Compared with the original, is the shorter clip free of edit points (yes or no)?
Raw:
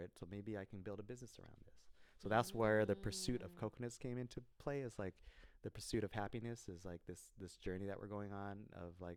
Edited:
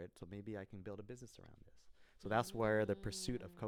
yes